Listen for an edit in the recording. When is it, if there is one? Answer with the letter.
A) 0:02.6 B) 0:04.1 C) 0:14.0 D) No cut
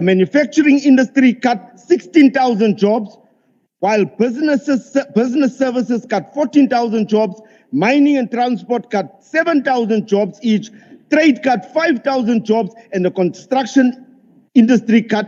D